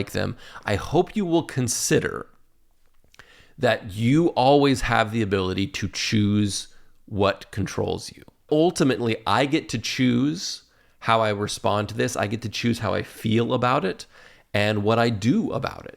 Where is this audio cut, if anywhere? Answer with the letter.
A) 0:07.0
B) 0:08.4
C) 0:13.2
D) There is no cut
B